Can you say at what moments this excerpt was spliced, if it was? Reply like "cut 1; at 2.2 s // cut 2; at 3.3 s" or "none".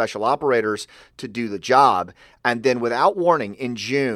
cut 1; at 3.1 s